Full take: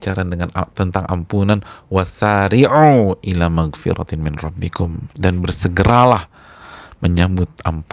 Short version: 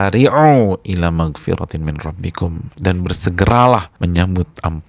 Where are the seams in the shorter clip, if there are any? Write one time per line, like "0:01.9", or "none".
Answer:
0:03.9